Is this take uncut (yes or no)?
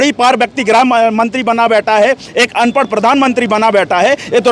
yes